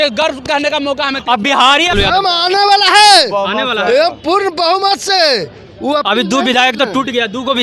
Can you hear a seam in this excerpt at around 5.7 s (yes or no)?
no